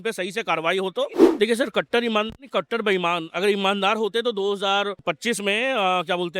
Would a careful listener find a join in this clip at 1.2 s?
yes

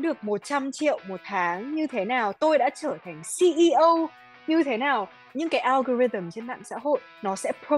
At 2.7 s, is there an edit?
no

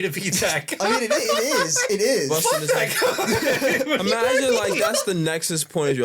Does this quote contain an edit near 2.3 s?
yes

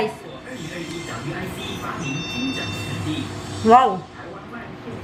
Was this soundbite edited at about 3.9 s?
no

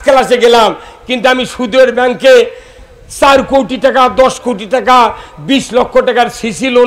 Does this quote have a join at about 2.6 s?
no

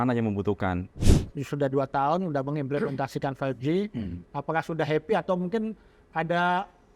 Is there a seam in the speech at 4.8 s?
no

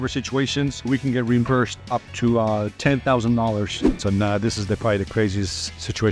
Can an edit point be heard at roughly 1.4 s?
no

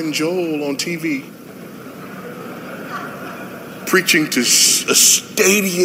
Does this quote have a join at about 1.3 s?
yes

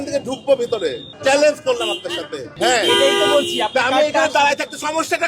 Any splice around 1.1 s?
yes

